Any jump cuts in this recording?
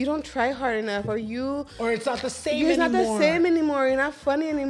no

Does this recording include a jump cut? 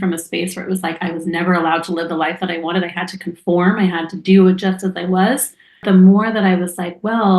yes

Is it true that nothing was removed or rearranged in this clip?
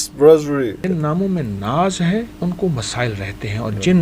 no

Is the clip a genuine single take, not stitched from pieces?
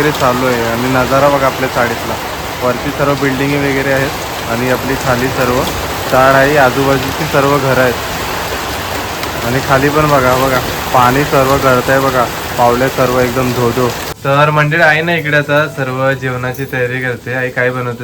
no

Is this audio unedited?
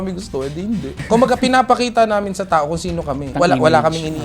no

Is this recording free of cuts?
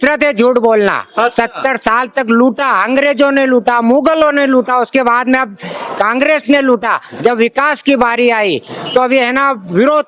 yes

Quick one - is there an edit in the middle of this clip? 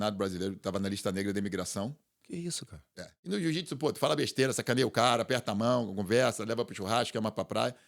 yes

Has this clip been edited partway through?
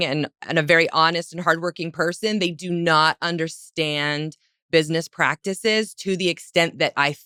no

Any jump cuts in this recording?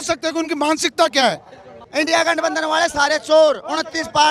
yes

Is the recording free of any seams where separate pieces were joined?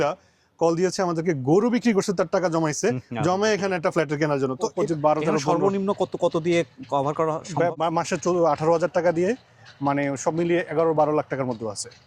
no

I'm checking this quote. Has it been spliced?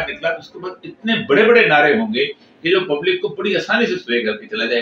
no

